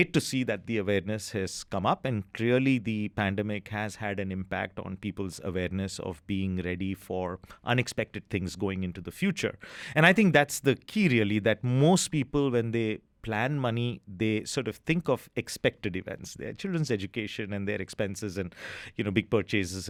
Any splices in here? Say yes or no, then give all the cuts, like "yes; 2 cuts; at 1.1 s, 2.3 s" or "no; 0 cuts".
no; 0 cuts